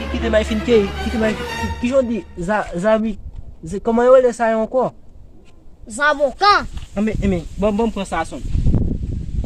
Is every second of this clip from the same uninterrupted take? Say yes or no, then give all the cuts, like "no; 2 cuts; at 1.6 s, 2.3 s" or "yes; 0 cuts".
no; 1 cut; at 7.9 s